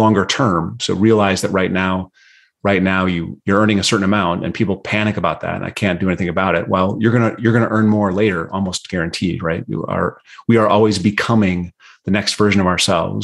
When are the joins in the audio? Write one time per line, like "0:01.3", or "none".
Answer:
none